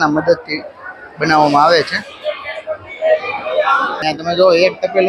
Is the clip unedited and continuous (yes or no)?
no